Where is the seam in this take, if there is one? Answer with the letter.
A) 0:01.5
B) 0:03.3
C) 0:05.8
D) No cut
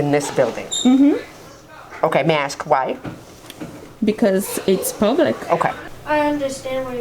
C